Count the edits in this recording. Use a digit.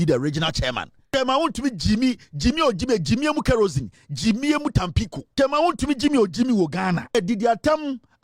3